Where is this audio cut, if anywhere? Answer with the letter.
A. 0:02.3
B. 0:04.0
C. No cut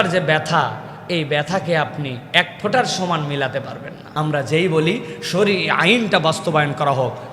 B